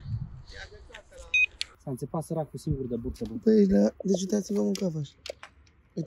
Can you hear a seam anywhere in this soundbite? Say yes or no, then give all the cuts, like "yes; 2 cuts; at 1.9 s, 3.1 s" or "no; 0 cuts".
yes; 1 cut; at 1.7 s